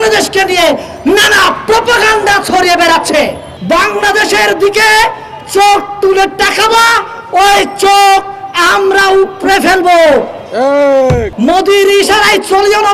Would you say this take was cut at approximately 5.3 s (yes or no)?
no